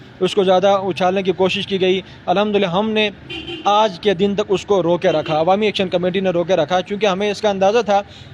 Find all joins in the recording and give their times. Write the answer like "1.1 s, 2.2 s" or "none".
2.1 s